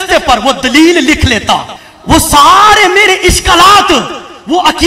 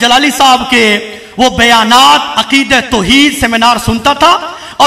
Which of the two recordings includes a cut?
first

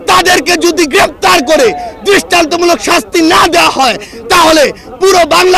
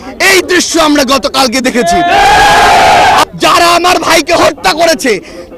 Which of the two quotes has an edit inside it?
second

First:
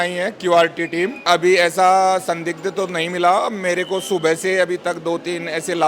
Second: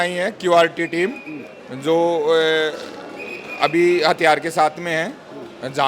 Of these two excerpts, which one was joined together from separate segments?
first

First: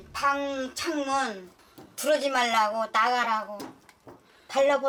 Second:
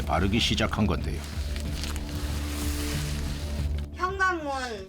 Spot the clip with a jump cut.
second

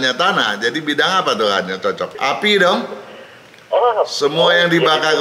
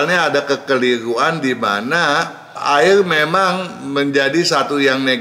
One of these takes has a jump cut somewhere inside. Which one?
first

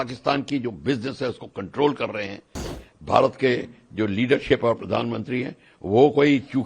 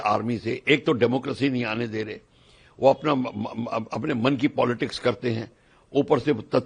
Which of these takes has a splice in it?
first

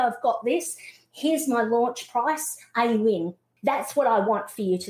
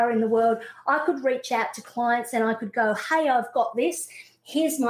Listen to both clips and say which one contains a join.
first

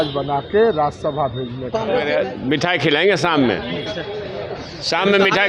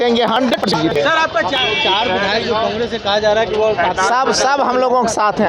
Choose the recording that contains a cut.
first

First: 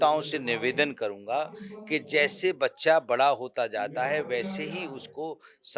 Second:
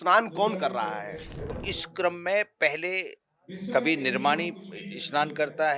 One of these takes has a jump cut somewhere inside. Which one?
second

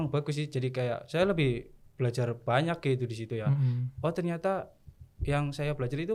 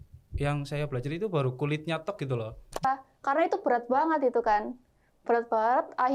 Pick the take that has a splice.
second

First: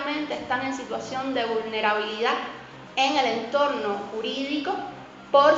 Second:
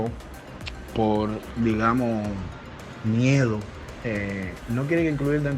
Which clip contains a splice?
second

